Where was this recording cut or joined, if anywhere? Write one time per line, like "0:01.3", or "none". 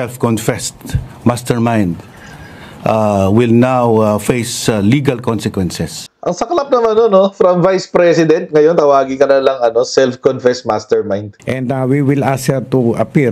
0:06.1
0:11.3